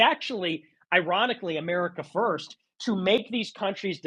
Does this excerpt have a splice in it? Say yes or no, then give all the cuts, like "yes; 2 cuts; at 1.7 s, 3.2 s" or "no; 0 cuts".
no; 0 cuts